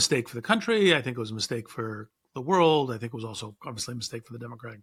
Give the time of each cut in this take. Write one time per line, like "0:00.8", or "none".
none